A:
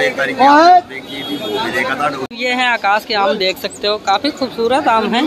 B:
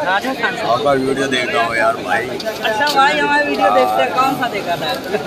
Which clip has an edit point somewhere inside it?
A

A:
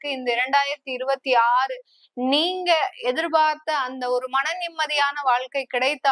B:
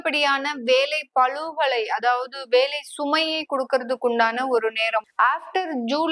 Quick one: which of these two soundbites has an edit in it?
B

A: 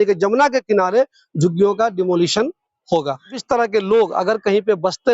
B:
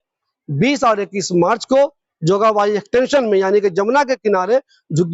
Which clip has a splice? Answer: A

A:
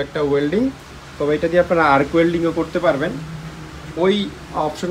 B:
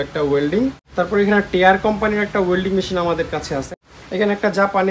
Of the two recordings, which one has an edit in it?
B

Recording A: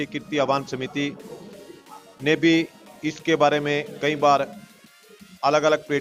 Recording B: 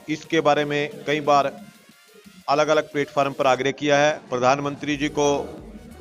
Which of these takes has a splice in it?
B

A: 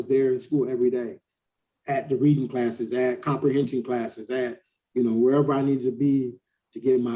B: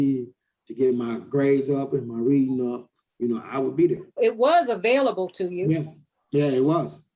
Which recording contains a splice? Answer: B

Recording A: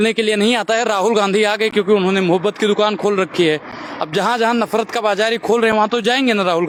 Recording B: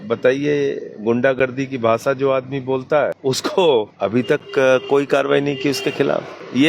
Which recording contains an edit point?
B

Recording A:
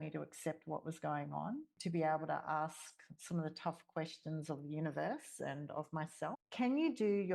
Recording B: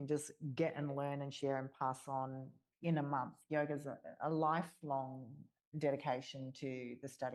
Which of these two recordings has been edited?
A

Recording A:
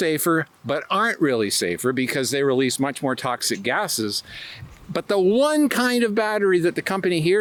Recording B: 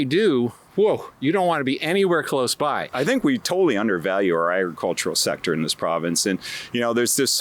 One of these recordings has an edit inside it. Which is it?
B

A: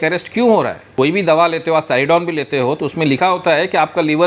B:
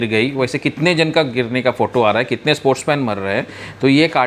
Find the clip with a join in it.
A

